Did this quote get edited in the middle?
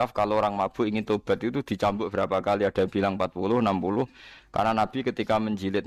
no; 0 cuts

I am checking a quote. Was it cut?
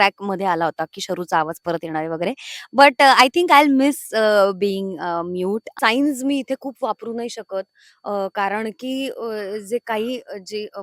yes; 1 cut; at 5.7 s

